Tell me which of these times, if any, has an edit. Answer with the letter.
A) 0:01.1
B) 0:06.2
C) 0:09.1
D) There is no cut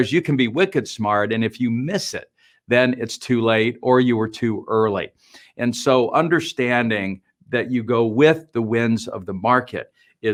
D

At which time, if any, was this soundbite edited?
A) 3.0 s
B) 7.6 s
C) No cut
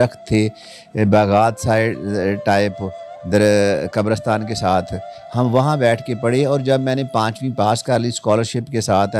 C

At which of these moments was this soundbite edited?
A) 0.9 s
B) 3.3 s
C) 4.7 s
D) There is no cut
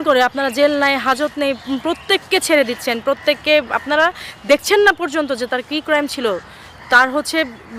D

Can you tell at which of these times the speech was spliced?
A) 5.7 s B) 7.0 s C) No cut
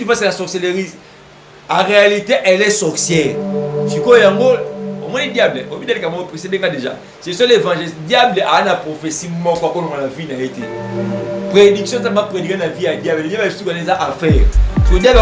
C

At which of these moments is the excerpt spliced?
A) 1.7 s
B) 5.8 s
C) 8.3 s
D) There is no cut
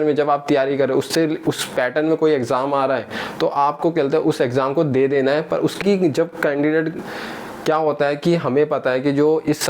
B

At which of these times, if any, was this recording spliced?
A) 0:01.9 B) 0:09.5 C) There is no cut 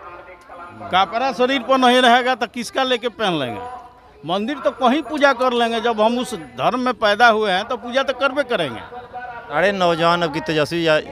B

